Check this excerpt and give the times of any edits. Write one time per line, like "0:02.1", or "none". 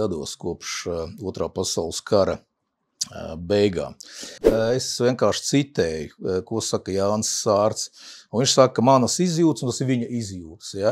0:04.4